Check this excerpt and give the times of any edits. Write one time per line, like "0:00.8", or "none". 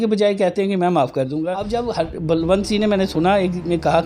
0:01.7

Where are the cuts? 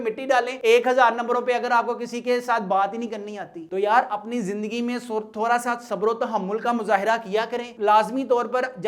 none

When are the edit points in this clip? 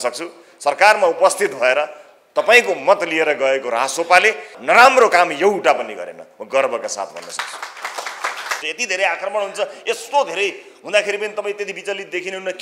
0:04.5
0:08.6

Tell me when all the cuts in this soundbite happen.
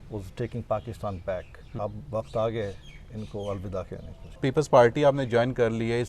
0:01.7
0:04.4

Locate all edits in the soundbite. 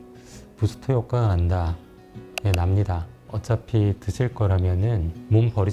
0:03.3

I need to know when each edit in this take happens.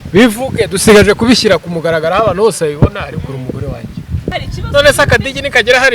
0:04.3

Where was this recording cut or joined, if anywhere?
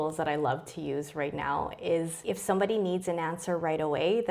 0:02.2

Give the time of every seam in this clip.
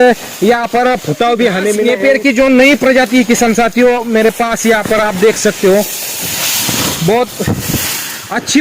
0:01.8

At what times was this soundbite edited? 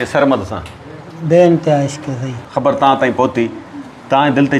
0:02.4

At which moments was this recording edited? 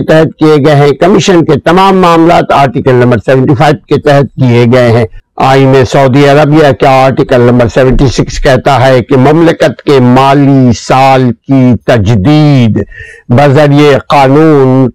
0:05.2

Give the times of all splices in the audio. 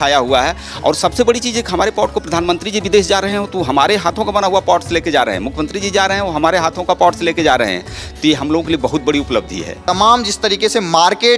0:09.7

